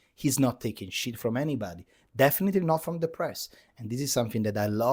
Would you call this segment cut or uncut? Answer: uncut